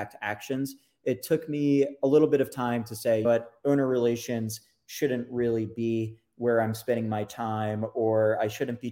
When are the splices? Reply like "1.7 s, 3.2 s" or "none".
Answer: 1.9 s, 3.2 s